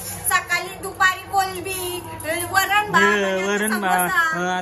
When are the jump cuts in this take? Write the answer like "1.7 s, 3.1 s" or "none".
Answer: none